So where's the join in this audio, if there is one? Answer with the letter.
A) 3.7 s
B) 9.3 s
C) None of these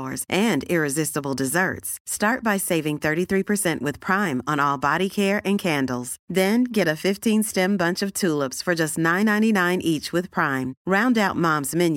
C